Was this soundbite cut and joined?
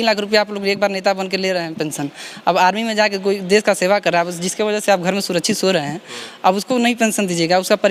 no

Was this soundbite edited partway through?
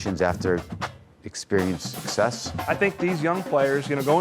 yes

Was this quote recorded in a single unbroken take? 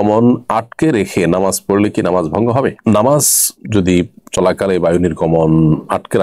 yes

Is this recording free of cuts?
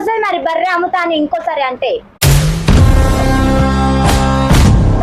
yes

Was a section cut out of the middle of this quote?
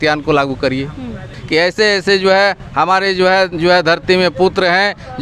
yes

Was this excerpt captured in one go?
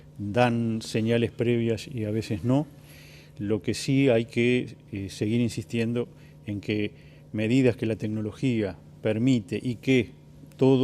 no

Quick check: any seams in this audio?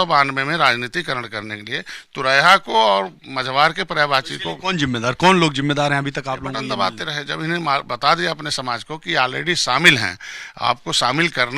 yes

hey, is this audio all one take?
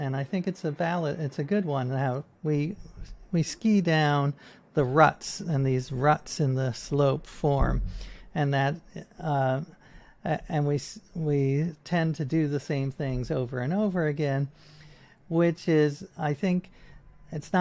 yes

